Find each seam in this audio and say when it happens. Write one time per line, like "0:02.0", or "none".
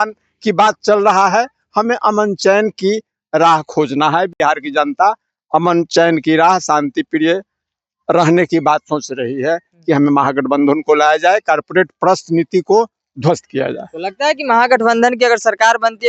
none